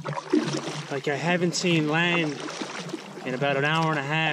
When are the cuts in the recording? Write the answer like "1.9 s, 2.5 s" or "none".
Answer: none

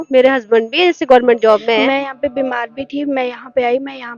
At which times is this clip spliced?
1.9 s

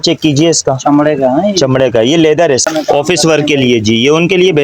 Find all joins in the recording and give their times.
2.7 s

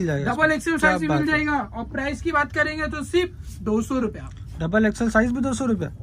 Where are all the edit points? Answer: none

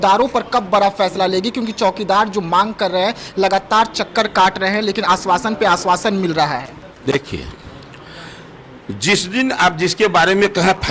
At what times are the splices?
none

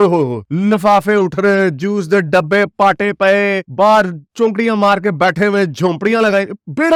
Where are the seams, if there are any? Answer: none

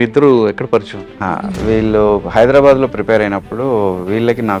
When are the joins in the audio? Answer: 1.1 s

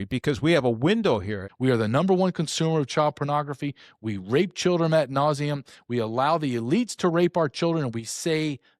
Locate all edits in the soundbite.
1.4 s

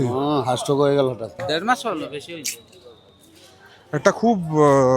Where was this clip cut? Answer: 1.4 s

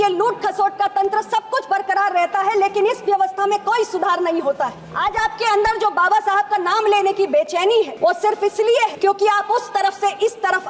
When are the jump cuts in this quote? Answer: 4.9 s, 7.9 s, 8.9 s

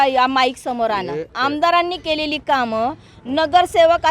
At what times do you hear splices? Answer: 1.3 s

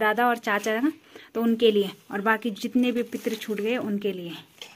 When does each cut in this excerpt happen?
none

